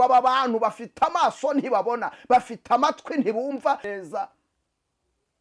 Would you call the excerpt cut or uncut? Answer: cut